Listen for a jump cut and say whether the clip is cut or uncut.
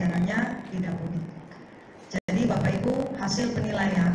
uncut